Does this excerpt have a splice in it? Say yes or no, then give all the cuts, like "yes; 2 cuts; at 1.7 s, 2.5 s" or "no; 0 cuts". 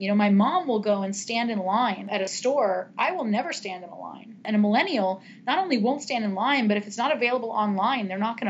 yes; 2 cuts; at 2.1 s, 4.4 s